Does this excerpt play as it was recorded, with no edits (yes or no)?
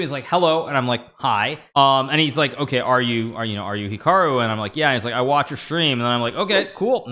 no